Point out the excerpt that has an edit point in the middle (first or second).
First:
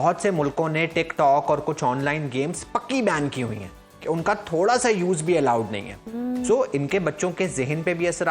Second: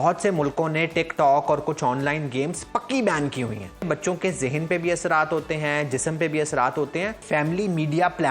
second